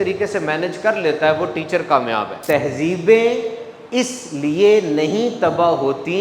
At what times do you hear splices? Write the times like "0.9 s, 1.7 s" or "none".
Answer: 2.3 s

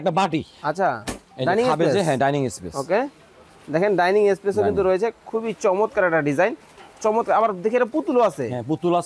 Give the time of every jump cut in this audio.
none

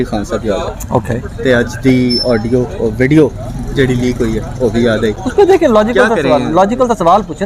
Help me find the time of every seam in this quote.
none

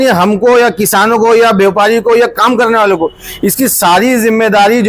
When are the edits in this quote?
none

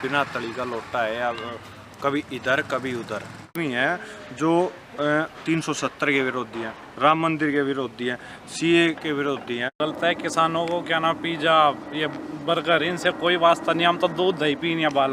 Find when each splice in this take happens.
3.6 s, 9.7 s

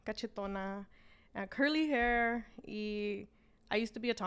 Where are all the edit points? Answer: none

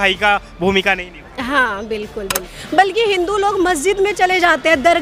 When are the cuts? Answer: 2.6 s

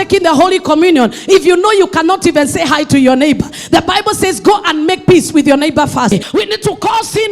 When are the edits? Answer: 6.3 s

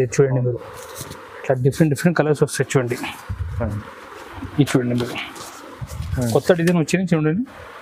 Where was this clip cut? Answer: 6.1 s

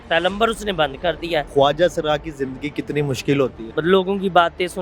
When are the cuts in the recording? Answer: 1.5 s, 3.7 s

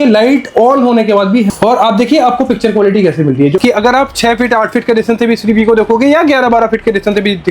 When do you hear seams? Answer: 1.5 s, 3.5 s

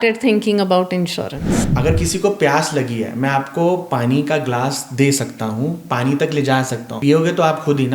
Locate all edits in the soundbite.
1.7 s, 6.8 s

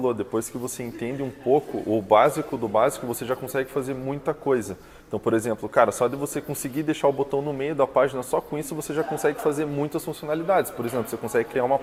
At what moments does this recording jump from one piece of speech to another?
none

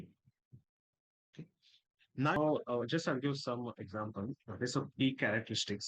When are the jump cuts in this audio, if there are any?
2.4 s

